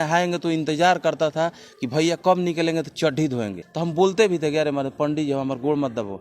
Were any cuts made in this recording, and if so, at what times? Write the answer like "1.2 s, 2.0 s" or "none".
3.6 s